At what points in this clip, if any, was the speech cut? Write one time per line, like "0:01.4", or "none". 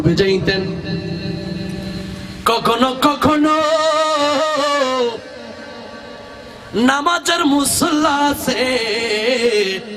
none